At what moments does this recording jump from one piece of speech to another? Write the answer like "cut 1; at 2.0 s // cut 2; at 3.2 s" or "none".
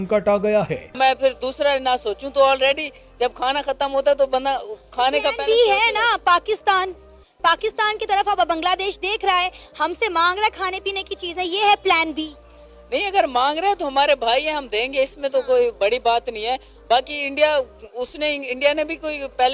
cut 1; at 1.0 s

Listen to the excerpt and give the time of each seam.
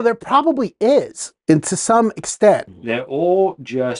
cut 1; at 2.7 s

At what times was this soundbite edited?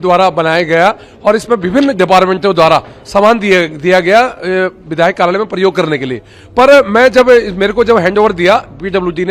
none

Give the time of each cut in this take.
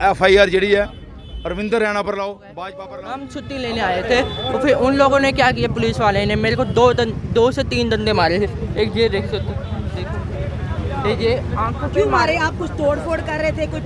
cut 1; at 2.5 s

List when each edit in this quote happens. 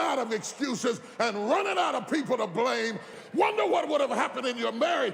cut 1; at 3.2 s

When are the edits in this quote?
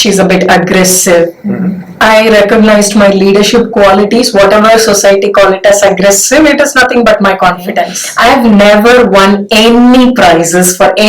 cut 1; at 1.4 s // cut 2; at 8.0 s

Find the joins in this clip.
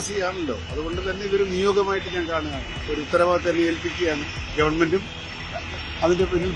none

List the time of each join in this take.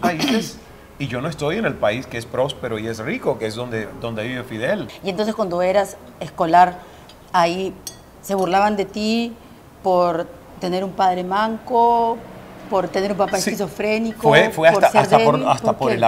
cut 1; at 4.9 s

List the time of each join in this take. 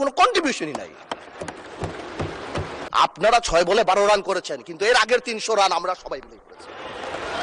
cut 1; at 2.9 s

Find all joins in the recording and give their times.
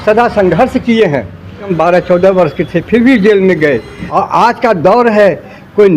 cut 1; at 1.7 s // cut 2; at 4.0 s

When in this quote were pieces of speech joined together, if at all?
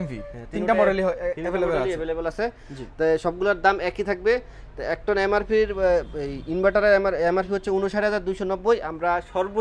none

